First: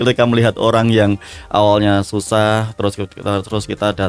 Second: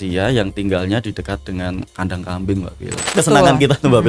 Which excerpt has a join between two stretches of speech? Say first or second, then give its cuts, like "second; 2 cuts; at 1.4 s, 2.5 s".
second; 1 cut; at 3.0 s